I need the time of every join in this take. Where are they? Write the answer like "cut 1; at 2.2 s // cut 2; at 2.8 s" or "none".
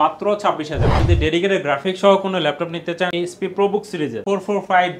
cut 1; at 1.0 s // cut 2; at 3.1 s // cut 3; at 4.2 s